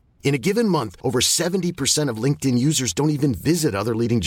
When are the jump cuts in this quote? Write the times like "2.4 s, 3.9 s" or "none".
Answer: none